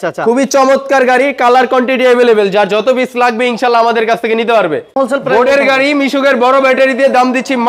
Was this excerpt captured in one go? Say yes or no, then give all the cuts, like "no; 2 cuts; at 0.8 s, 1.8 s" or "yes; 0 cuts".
no; 1 cut; at 4.9 s